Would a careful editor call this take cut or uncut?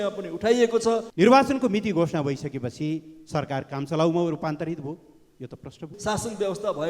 cut